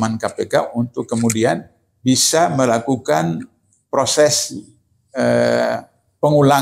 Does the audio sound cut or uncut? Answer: uncut